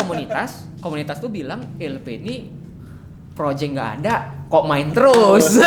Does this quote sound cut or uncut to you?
uncut